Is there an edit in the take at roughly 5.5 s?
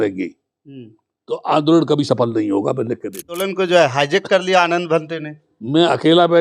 no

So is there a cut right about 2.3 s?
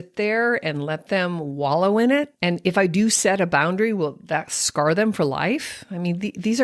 yes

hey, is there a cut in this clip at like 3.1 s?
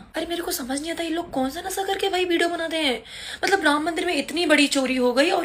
no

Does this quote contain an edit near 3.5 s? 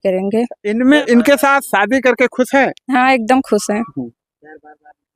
no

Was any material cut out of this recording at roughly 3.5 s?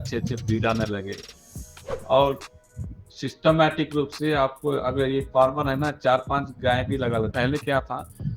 no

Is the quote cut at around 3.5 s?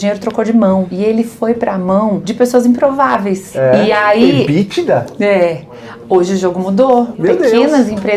yes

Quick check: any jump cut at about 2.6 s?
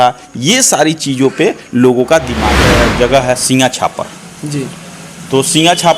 yes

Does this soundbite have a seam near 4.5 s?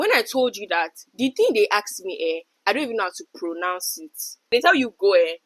yes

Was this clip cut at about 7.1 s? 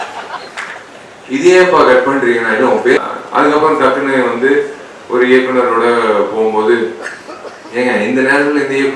no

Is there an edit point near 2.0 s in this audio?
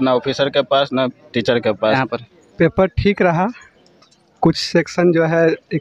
yes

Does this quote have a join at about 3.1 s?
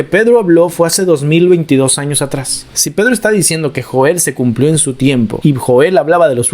no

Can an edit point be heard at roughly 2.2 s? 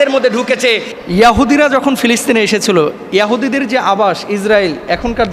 no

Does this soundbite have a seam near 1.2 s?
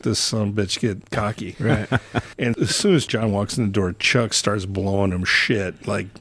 yes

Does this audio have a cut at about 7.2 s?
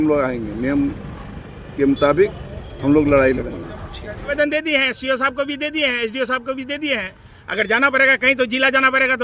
no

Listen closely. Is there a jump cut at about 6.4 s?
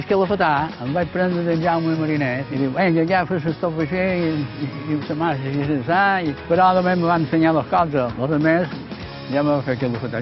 yes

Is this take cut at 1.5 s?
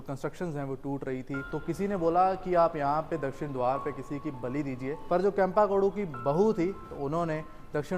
yes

